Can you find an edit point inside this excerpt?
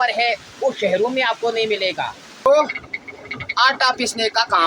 yes; 1 cut; at 2.5 s

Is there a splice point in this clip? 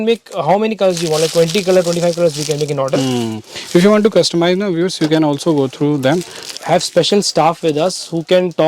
yes; 1 cut; at 6.5 s

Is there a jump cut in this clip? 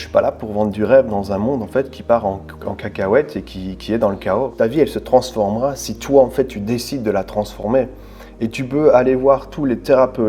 yes; 1 cut; at 4.5 s

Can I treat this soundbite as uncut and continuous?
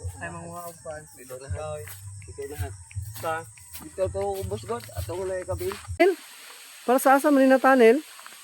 no; 1 cut; at 6.0 s

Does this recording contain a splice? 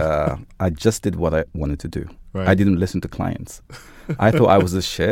yes; 1 cut; at 1.5 s

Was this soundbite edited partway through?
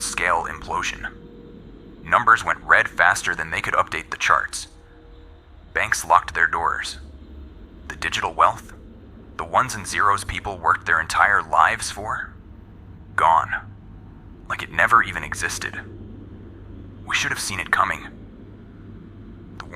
yes; 2 cuts; at 15.9 s, 17.1 s

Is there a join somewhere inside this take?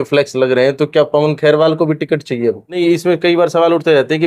yes; 1 cut; at 2.7 s

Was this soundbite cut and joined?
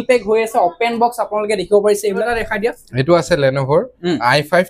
no; 0 cuts

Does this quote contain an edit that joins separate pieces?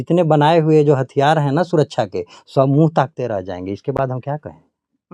no; 0 cuts

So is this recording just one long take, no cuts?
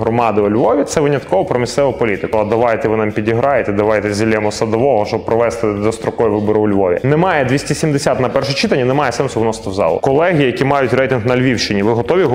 no; 3 cuts; at 2.3 s, 7.0 s, 10.0 s

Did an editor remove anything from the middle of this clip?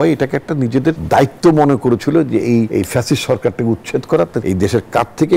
yes; 3 cuts; at 1.0 s, 2.7 s, 4.4 s

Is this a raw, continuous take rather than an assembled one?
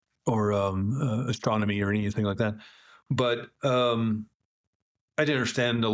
yes; 0 cuts

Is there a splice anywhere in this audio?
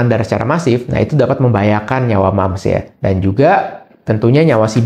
no; 0 cuts

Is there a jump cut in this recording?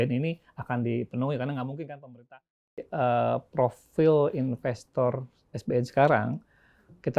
yes; 1 cut; at 2.7 s

